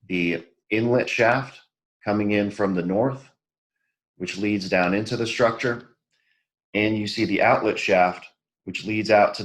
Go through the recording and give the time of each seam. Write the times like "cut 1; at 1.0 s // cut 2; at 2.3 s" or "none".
none